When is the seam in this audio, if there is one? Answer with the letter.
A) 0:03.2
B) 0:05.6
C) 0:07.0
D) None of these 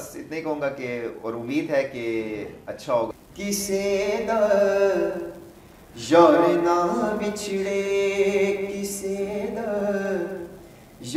A